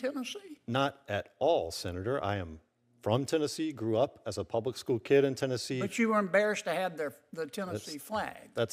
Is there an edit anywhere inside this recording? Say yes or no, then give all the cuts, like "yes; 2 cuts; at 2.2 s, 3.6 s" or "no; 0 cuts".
no; 0 cuts